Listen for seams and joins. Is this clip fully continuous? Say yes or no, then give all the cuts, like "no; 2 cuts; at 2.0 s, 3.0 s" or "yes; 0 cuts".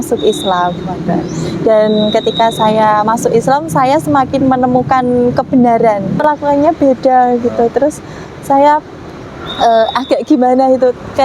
no; 1 cut; at 6.2 s